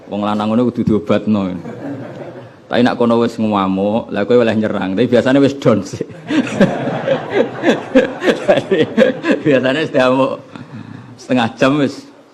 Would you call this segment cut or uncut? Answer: uncut